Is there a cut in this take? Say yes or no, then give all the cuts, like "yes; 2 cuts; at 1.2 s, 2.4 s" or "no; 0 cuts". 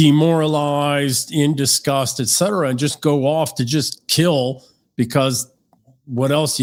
no; 0 cuts